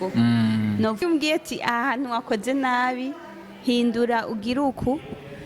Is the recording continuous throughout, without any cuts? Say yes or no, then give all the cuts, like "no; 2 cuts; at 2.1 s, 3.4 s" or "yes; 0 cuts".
no; 1 cut; at 1.0 s